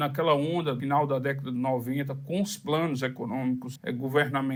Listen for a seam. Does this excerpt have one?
no; 0 cuts

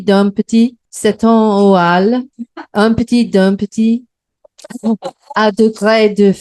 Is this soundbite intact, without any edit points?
yes; 0 cuts

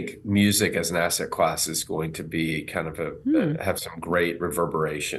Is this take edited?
no; 0 cuts

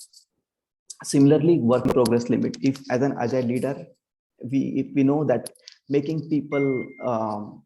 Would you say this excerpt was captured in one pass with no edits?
yes; 0 cuts

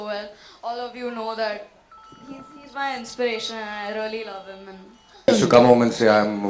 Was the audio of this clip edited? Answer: yes; 1 cut; at 5.3 s

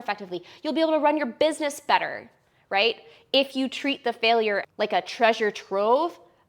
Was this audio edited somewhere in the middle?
yes; 1 cut; at 4.6 s

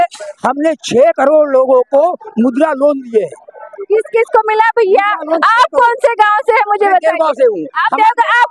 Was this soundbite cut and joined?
no; 0 cuts

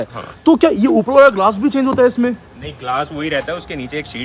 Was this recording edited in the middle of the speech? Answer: no; 0 cuts

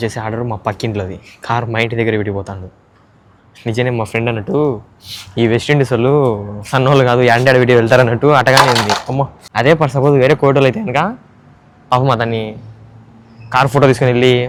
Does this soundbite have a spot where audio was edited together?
no; 0 cuts

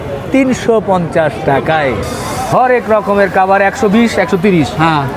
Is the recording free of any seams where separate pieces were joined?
no; 1 cut; at 2.2 s

